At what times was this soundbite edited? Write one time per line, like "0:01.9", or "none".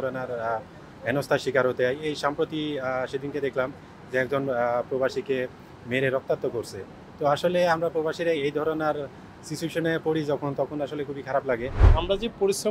0:11.8